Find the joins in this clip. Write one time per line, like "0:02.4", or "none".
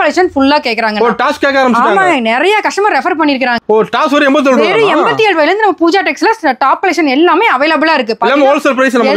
0:03.6